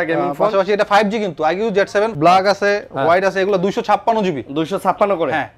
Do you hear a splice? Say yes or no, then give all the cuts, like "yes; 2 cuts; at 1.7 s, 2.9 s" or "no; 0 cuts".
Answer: yes; 1 cut; at 2.1 s